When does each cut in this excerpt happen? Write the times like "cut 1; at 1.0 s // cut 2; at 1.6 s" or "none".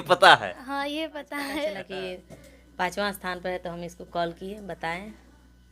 cut 1; at 1.9 s